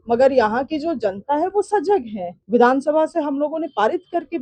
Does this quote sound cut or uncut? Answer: cut